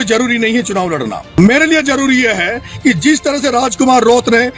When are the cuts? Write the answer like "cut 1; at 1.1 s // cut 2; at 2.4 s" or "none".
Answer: cut 1; at 1.2 s

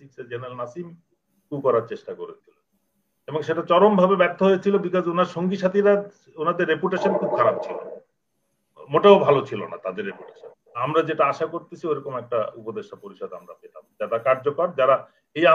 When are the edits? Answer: cut 1; at 10.8 s

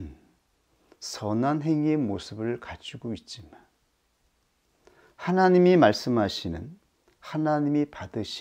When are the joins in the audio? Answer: none

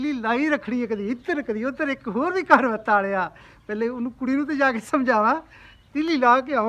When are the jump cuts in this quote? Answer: none

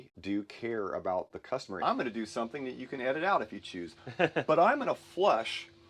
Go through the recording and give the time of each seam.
cut 1; at 1.7 s

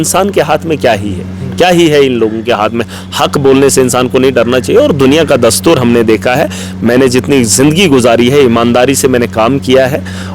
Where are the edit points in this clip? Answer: none

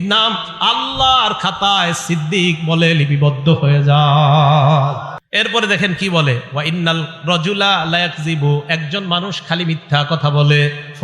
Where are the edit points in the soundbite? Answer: cut 1; at 5.2 s

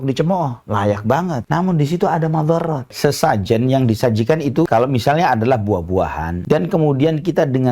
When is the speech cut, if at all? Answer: cut 1; at 1.4 s // cut 2; at 2.9 s // cut 3; at 4.7 s // cut 4; at 6.4 s

